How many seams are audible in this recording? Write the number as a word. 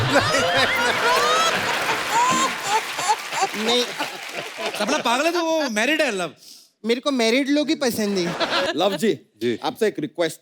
one